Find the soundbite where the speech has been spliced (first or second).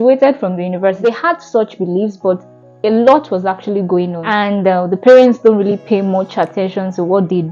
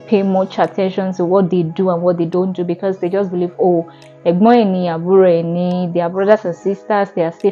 first